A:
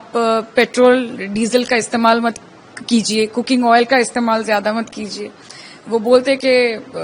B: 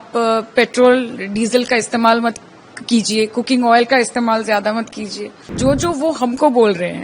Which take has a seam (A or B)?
B